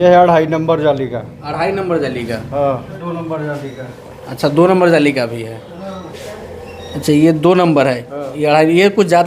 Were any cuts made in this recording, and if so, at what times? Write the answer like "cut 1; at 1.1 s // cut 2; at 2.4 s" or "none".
cut 1; at 3.0 s // cut 2; at 6.1 s